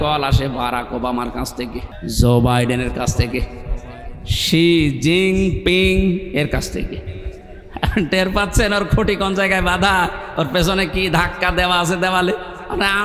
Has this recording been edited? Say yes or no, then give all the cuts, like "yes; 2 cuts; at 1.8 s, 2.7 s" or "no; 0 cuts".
yes; 1 cut; at 1.9 s